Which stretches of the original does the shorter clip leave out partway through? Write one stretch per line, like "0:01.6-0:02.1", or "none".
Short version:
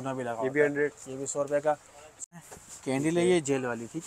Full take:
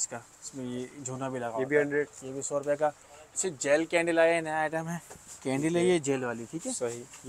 0:03.5-0:04.9